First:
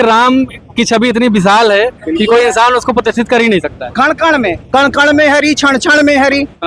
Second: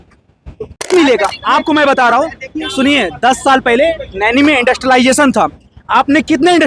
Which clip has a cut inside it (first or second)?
second